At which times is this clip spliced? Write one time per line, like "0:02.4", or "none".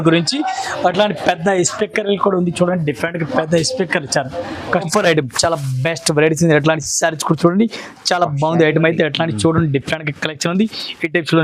0:04.9